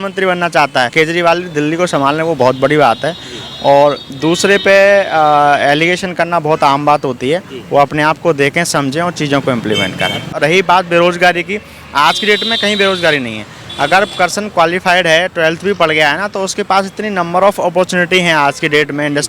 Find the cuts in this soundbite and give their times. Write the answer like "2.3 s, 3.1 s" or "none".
0.9 s, 10.3 s